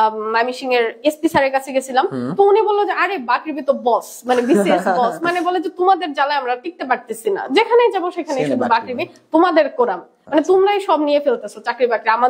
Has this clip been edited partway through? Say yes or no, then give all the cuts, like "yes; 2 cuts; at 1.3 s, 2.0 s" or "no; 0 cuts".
no; 0 cuts